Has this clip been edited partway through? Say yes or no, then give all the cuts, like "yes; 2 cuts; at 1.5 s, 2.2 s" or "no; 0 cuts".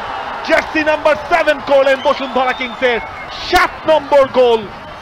no; 0 cuts